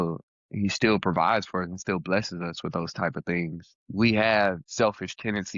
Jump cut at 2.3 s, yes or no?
no